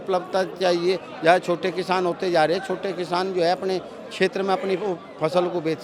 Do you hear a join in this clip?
no; 0 cuts

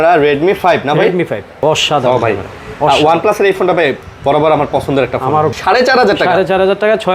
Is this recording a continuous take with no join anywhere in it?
no; 2 cuts; at 1.6 s, 5.5 s

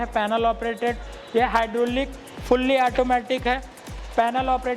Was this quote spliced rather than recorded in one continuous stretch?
no; 0 cuts

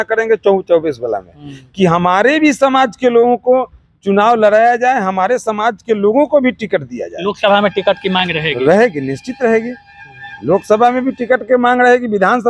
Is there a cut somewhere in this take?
no; 0 cuts

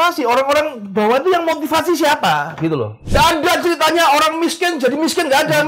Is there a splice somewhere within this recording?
yes; 1 cut; at 3.0 s

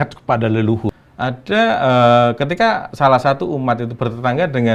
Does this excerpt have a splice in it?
yes; 1 cut; at 1.0 s

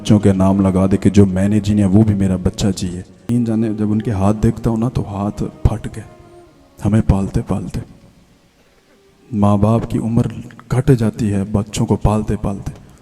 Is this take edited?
yes; 1 cut; at 3.2 s

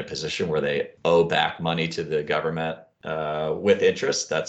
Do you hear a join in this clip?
yes; 1 cut; at 2.9 s

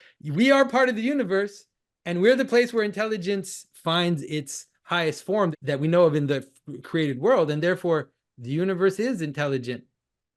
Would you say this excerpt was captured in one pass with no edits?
no; 2 cuts; at 3.6 s, 5.5 s

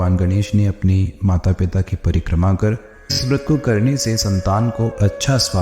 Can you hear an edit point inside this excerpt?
yes; 1 cut; at 3.2 s

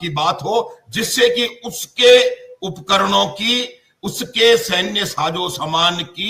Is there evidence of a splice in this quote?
no; 0 cuts

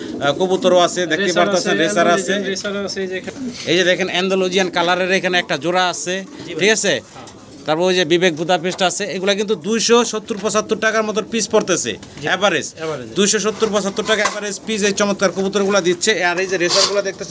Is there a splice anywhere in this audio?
no; 0 cuts

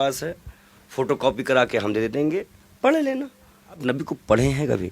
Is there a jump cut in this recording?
yes; 1 cut; at 3.8 s

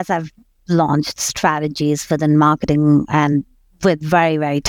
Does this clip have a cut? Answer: no; 0 cuts

